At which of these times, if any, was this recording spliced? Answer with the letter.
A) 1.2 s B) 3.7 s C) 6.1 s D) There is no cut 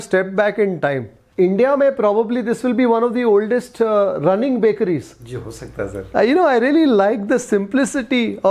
A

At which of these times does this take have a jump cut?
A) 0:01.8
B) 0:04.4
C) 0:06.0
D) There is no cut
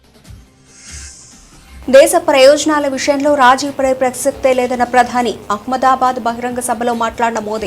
A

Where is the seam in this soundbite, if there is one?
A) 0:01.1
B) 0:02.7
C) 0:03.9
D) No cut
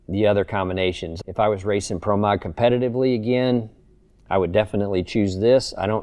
A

